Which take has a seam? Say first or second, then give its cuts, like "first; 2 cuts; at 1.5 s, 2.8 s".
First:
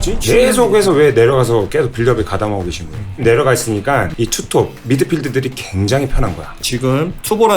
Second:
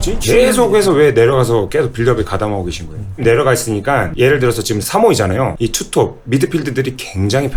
first; 2 cuts; at 4.1 s, 6.6 s